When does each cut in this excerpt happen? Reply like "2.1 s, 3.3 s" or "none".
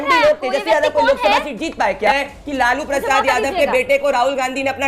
2.1 s

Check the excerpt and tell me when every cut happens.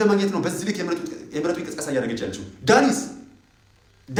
none

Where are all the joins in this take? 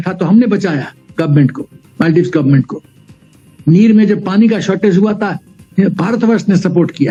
none

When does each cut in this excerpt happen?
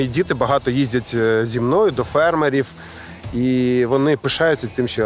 none

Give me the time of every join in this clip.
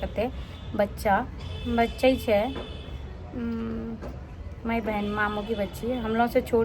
none

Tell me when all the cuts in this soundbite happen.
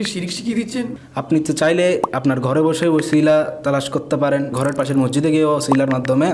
1.0 s, 4.5 s

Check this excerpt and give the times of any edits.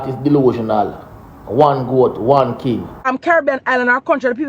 3.0 s

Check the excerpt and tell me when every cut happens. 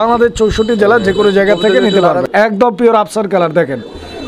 2.2 s

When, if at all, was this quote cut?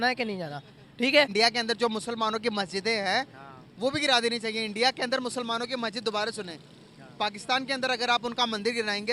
1.3 s

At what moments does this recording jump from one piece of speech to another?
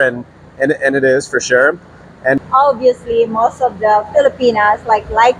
2.4 s

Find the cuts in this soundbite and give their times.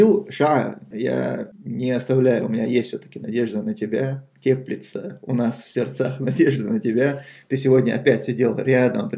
1.0 s

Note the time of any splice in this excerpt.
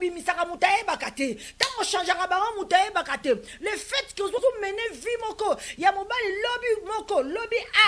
4.4 s

